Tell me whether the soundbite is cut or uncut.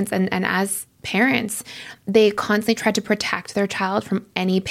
uncut